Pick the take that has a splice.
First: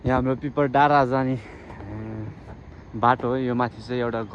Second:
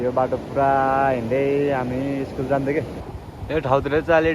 second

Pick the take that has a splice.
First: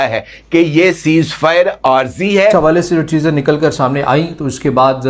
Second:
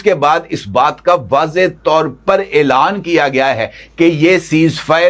first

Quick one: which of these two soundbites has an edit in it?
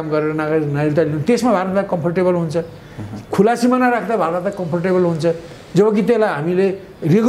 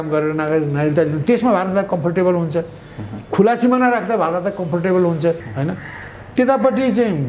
second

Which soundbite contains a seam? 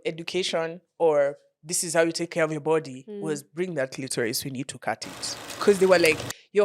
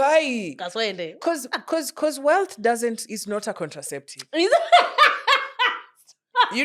first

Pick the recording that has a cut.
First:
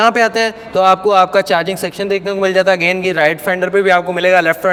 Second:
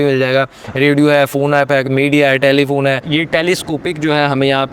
second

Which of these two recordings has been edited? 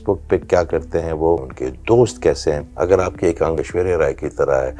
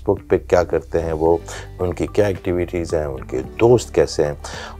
first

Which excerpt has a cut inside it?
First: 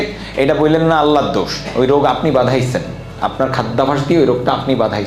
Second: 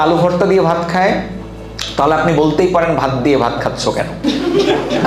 second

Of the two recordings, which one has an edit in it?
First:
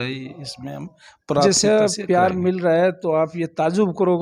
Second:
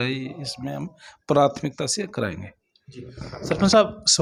first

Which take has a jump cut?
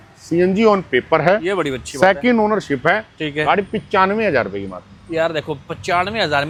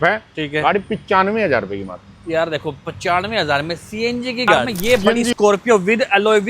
second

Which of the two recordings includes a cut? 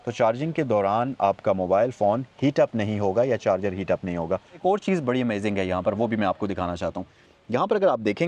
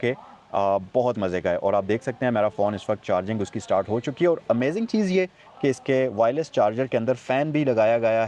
first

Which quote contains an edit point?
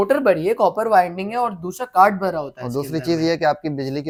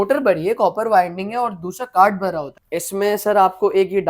second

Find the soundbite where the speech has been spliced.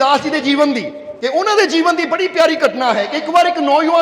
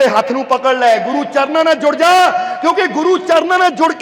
first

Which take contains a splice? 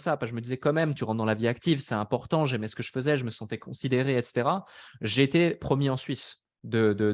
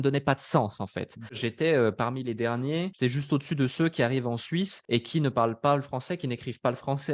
second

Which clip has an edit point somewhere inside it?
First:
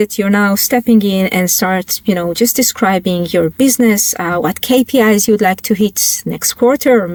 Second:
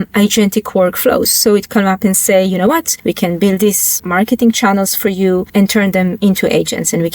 second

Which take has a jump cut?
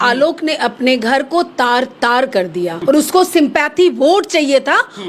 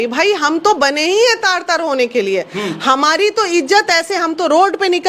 first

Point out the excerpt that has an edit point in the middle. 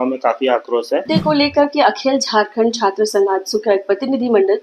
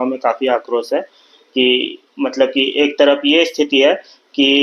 first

